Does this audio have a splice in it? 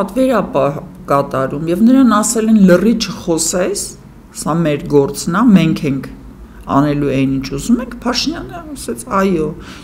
no; 0 cuts

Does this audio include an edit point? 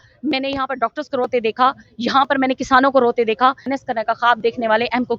yes; 1 cut; at 3.7 s

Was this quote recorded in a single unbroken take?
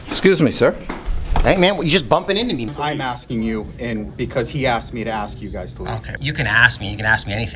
no; 2 cuts; at 2.7 s, 6.1 s

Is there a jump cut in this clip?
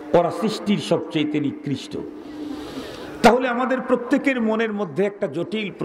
no; 0 cuts

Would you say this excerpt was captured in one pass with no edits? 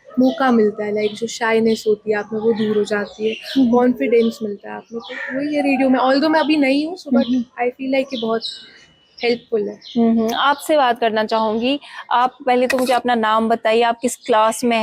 yes; 0 cuts

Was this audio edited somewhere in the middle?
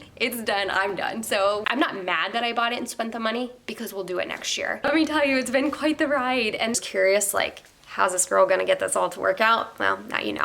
yes; 3 cuts; at 1.6 s, 4.9 s, 6.7 s

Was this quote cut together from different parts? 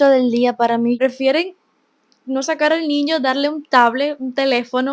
yes; 1 cut; at 1.0 s

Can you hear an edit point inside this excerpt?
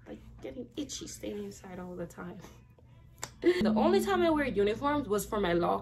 yes; 1 cut; at 3.6 s

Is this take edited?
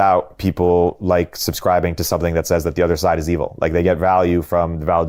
no; 0 cuts

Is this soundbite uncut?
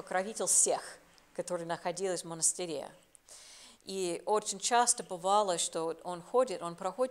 yes; 0 cuts

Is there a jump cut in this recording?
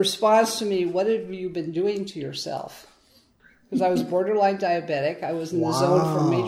no; 0 cuts

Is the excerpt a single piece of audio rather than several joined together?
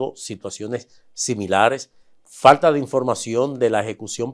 yes; 0 cuts

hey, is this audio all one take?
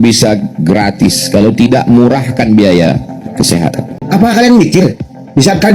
no; 1 cut; at 3.9 s

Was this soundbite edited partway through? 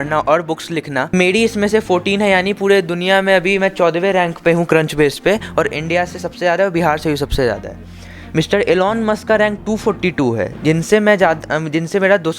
yes; 1 cut; at 1.1 s

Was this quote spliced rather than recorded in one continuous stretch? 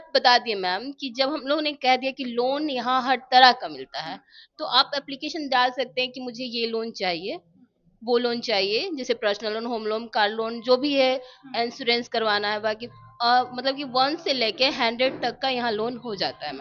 no; 0 cuts

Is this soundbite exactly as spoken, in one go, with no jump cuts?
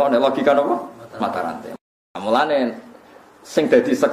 no; 1 cut; at 1.7 s

